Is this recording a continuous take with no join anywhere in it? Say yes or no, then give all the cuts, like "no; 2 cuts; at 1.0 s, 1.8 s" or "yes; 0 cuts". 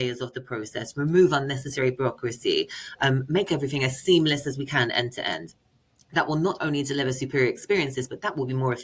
yes; 0 cuts